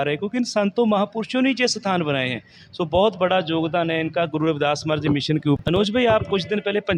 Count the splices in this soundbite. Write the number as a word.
one